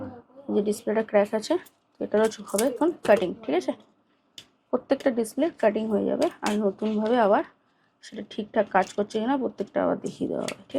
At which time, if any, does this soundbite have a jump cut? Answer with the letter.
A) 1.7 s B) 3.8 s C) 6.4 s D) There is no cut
D